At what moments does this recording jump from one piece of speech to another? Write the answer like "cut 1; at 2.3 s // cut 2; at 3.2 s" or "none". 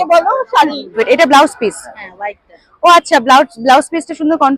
cut 1; at 1.0 s